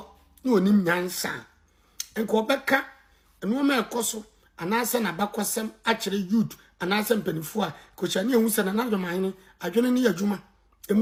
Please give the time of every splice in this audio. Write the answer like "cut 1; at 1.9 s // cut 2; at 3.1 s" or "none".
none